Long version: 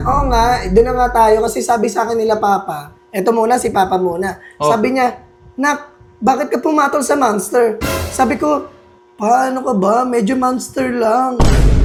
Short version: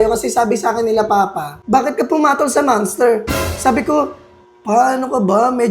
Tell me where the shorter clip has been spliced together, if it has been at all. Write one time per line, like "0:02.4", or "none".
0:01.5